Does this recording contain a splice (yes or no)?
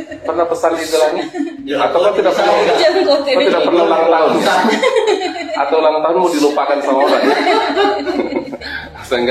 no